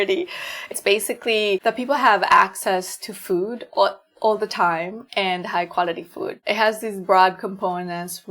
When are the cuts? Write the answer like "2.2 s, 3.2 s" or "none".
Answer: 1.6 s, 6.4 s